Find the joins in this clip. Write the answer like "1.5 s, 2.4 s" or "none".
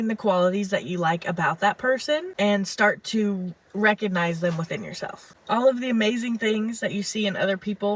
5.3 s